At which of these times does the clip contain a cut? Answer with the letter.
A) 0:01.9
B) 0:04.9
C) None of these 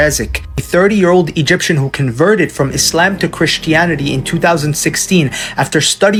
C